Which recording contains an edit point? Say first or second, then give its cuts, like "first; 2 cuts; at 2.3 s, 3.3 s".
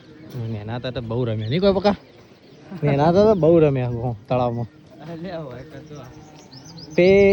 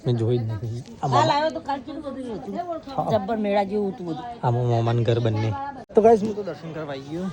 second; 1 cut; at 5.8 s